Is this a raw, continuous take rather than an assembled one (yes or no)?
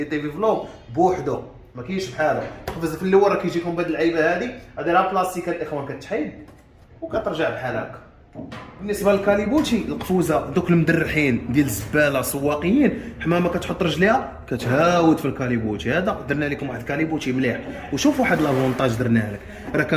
yes